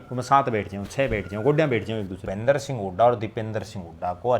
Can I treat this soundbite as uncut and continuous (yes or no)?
no